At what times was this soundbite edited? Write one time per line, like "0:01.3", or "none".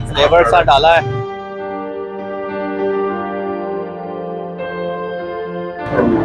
none